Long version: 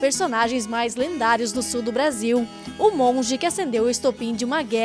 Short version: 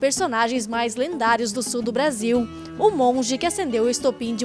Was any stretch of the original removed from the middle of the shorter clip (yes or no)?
no